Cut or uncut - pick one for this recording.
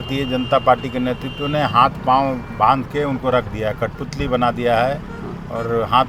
uncut